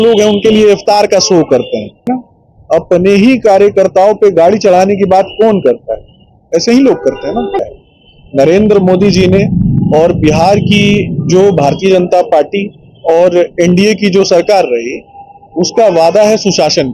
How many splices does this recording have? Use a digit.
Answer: 2